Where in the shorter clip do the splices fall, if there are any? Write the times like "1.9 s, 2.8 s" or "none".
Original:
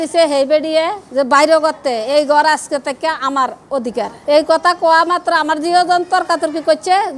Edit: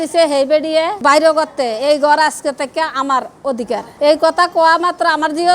1.0 s